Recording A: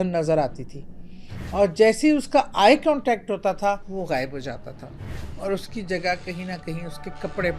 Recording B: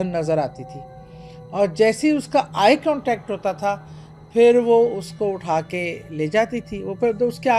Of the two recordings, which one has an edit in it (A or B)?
A